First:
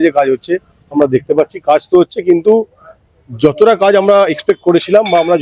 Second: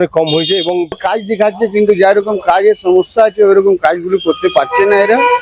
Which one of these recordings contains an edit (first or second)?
second